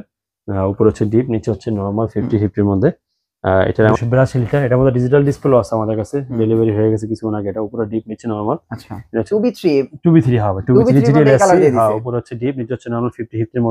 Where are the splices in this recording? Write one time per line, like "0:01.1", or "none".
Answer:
0:03.9
0:09.3